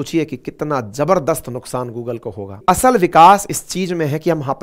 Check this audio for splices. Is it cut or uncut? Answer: cut